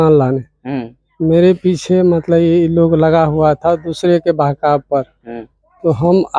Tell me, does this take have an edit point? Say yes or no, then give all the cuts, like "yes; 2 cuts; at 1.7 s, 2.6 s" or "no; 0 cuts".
no; 0 cuts